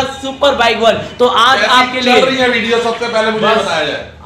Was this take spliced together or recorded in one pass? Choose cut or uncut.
uncut